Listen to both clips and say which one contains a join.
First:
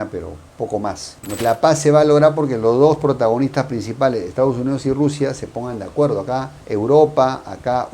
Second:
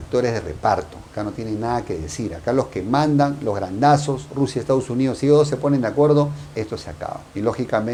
first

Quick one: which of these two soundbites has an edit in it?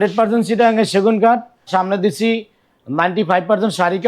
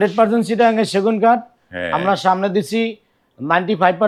first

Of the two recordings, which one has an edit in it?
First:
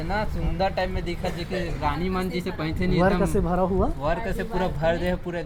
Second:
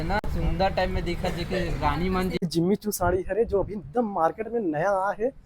second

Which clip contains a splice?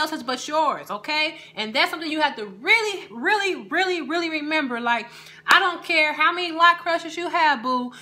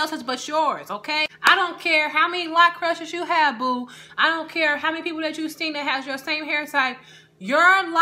second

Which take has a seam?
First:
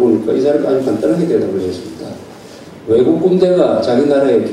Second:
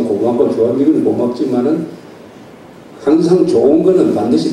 first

